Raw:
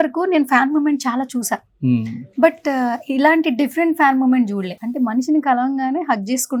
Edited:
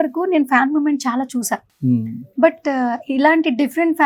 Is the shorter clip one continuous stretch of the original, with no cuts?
yes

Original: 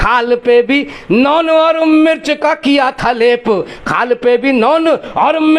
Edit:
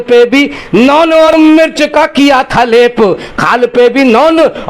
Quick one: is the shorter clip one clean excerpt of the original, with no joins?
no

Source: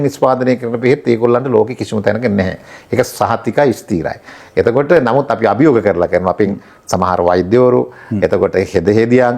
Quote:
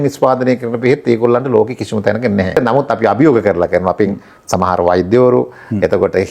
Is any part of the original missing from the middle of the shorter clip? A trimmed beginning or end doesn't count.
yes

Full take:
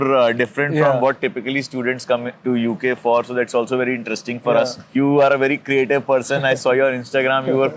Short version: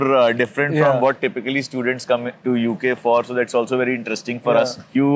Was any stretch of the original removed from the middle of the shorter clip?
no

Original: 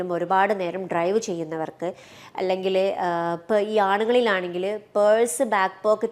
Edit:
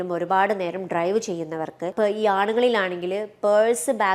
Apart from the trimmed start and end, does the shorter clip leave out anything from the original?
yes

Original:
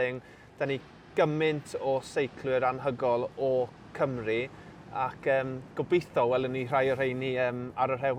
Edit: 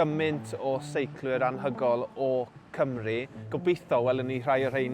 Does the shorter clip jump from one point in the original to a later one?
yes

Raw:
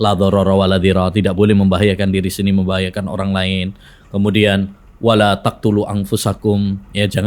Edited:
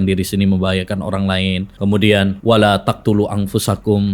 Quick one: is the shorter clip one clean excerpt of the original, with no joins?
no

